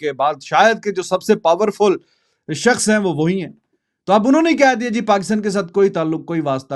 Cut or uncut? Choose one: uncut